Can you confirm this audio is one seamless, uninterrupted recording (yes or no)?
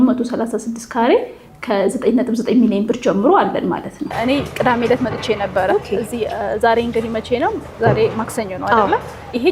no